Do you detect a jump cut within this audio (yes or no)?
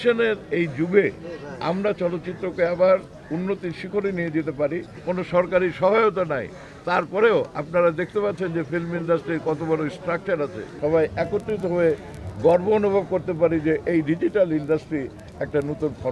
yes